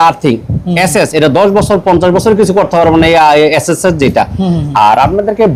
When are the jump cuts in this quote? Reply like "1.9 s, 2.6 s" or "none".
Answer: none